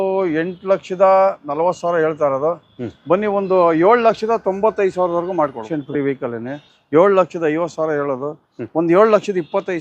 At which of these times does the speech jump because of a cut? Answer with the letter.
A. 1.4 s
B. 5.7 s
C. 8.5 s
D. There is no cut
B